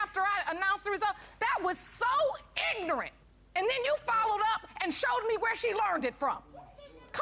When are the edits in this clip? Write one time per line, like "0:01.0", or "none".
none